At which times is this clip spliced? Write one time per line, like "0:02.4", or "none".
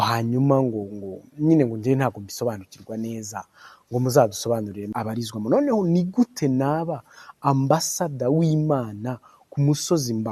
0:04.9